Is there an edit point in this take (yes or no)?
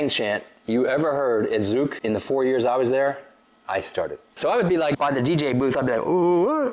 yes